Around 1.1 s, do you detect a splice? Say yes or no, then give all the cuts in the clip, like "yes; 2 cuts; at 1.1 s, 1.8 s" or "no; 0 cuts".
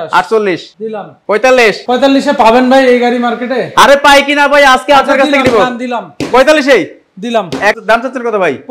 yes; 3 cuts; at 1.1 s, 1.8 s, 7.8 s